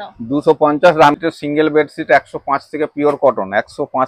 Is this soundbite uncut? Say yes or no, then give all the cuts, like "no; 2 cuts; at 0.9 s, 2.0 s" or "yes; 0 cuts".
no; 1 cut; at 1.2 s